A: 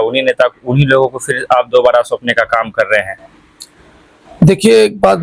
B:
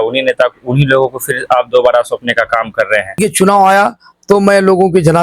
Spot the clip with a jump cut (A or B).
B